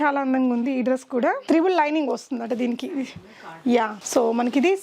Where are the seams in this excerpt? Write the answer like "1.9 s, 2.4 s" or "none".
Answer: none